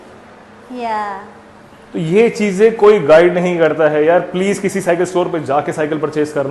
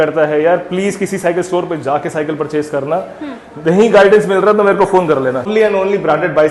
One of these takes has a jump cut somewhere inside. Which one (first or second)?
second